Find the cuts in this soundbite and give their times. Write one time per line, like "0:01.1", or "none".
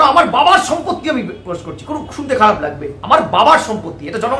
none